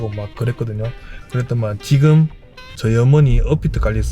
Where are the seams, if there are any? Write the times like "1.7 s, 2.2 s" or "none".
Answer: 1.1 s